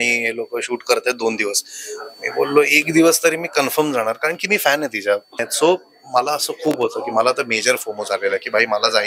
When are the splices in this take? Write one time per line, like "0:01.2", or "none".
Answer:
0:05.4